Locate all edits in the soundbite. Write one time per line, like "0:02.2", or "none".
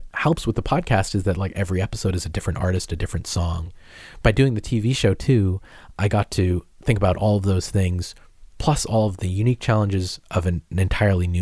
0:03.7